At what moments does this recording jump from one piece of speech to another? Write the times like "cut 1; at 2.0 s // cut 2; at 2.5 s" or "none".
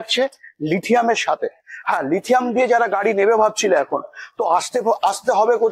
none